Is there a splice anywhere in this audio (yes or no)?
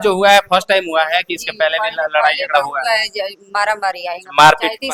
no